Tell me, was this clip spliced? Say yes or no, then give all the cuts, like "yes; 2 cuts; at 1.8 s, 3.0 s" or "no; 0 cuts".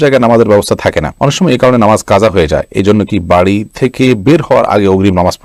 no; 0 cuts